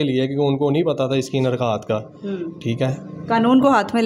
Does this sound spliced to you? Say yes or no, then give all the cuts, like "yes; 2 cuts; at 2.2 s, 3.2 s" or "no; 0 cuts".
no; 0 cuts